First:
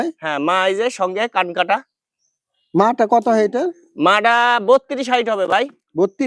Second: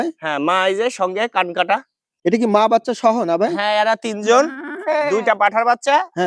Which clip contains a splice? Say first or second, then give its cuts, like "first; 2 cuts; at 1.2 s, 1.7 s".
second; 1 cut; at 2.1 s